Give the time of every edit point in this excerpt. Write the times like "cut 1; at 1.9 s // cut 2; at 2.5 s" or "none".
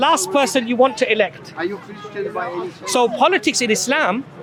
none